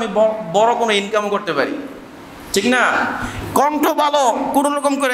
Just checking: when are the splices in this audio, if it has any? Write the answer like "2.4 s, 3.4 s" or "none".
3.4 s